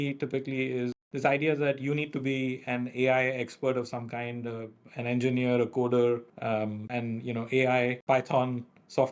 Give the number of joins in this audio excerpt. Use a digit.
3